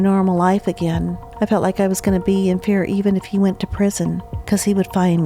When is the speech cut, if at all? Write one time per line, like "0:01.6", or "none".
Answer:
0:01.2
0:04.3